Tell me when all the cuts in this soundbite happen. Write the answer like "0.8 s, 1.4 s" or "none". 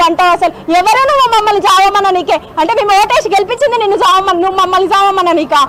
none